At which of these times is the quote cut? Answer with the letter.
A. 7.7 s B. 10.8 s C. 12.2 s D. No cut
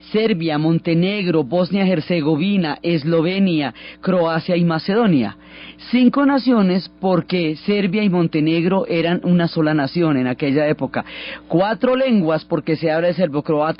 B